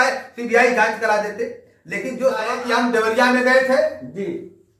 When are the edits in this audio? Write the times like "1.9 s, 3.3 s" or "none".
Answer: 2.6 s

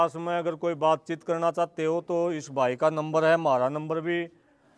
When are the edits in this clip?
none

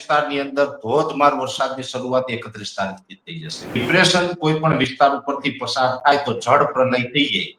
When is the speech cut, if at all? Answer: 3.8 s

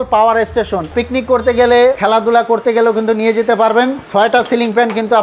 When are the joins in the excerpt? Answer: 0.9 s, 2.0 s, 4.0 s

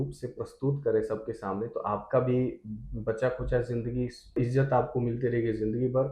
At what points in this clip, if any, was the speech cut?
4.4 s

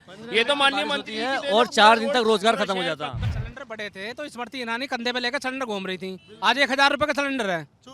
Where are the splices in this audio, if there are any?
3.2 s

